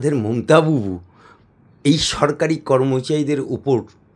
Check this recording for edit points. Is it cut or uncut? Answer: uncut